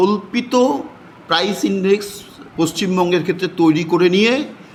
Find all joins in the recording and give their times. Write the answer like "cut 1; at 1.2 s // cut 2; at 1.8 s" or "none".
none